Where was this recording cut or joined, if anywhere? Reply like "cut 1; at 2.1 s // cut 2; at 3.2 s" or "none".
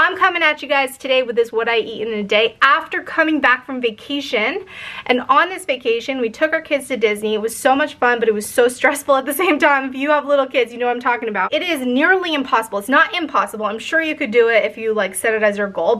none